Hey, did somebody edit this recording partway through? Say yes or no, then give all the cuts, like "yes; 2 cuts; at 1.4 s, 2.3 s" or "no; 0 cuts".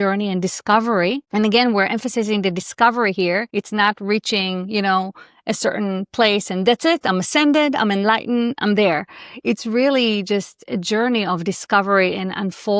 yes; 2 cuts; at 1.2 s, 3.5 s